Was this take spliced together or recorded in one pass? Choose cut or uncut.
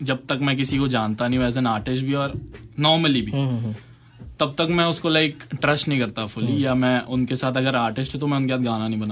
uncut